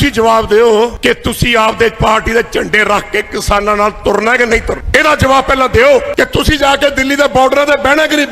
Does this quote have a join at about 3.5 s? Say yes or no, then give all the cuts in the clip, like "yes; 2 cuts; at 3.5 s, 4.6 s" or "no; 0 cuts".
no; 3 cuts; at 1.0 s, 4.8 s, 6.1 s